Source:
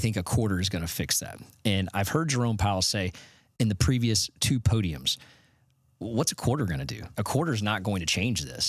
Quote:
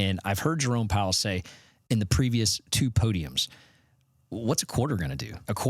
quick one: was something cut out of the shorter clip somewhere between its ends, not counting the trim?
no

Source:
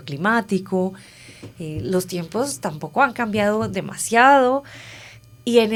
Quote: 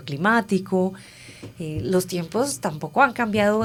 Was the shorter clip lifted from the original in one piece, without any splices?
yes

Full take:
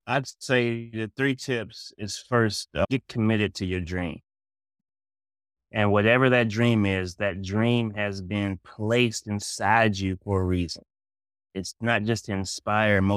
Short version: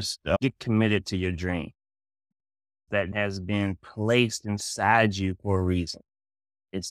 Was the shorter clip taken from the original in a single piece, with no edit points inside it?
no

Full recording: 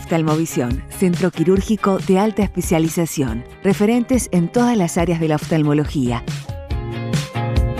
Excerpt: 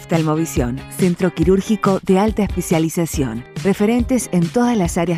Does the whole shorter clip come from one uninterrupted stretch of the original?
yes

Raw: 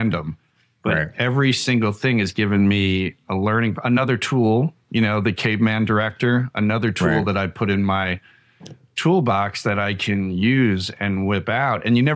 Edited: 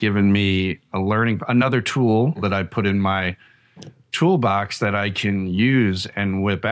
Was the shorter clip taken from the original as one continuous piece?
no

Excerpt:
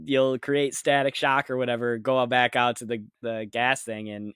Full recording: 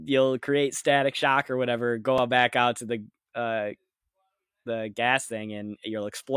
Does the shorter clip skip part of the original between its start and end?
yes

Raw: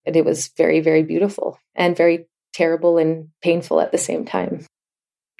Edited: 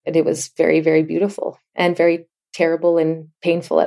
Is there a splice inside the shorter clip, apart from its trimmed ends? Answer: no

